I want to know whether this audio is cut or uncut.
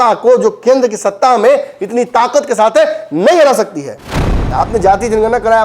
cut